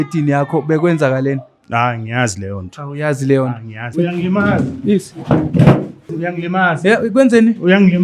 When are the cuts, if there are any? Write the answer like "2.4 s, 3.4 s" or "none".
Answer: 3.9 s, 6.2 s